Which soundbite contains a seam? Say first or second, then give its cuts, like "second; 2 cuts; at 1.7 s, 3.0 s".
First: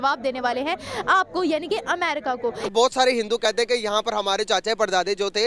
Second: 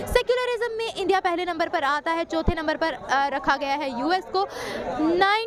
first; 1 cut; at 2.7 s